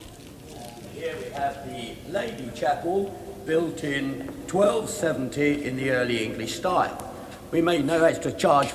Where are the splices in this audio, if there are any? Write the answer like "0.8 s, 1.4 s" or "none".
3.0 s